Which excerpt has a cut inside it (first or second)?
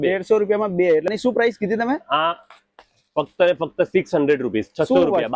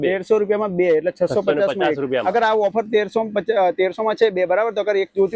first